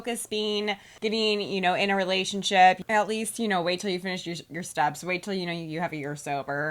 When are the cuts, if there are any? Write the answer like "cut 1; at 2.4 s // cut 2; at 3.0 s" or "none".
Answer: cut 1; at 2.8 s